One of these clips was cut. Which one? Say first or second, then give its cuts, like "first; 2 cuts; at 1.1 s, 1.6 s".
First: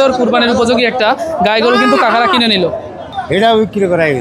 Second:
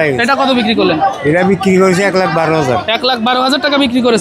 first; 1 cut; at 3.1 s